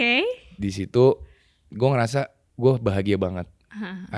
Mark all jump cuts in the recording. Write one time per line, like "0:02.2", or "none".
0:02.4